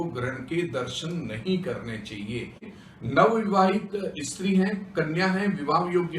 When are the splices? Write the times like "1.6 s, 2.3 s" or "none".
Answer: 2.7 s

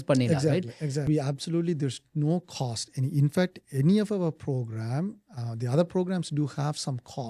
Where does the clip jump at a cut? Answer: 1.0 s

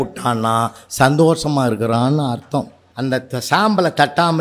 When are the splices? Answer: 2.8 s

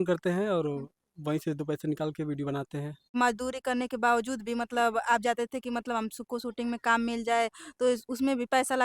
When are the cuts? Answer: 3.1 s

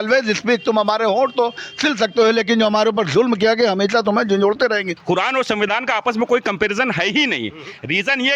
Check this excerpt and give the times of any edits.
4.9 s

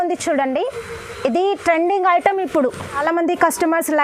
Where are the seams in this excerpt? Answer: 3.0 s

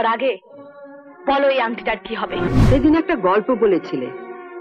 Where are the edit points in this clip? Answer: 2.5 s

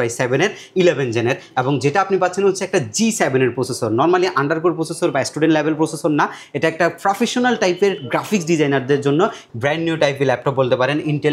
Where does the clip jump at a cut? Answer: 9.4 s

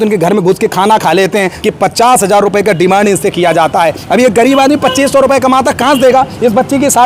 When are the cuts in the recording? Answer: 1.5 s

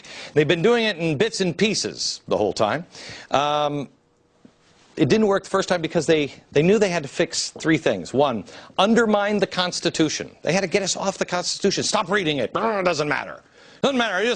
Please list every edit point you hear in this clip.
none

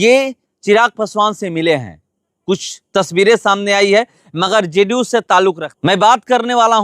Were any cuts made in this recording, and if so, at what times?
5.7 s

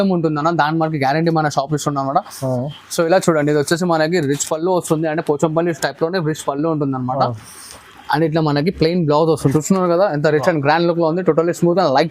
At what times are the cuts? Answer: 9.5 s

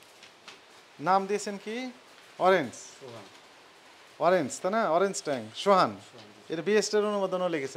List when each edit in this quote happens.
none

